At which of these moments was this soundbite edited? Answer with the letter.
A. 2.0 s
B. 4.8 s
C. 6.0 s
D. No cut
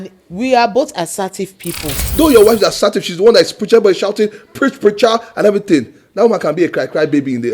A